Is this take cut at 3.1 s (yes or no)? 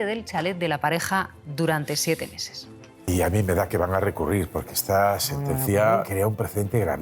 yes